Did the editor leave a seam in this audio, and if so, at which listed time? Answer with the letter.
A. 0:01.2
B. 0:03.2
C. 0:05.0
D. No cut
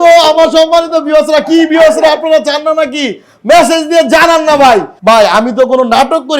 C